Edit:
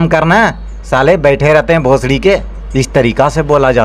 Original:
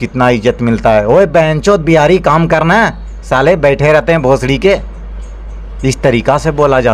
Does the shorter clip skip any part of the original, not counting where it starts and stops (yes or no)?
yes